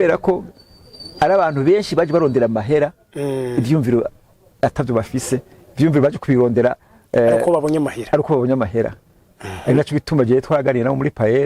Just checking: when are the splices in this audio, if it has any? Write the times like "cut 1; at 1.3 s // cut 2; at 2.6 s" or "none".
none